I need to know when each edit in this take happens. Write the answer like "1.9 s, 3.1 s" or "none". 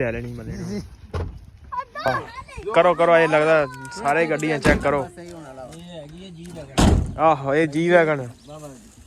2.0 s